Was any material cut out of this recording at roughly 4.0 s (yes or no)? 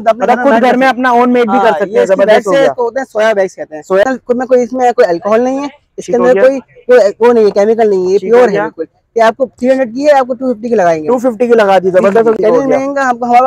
yes